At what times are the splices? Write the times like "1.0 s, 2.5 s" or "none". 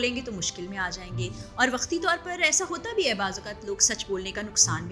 none